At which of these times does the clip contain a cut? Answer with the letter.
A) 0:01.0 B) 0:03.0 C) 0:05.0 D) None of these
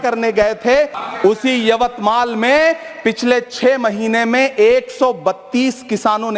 A